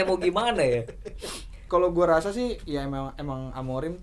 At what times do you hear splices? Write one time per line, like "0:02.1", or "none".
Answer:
0:01.7